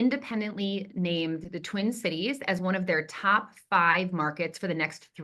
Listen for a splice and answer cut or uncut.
uncut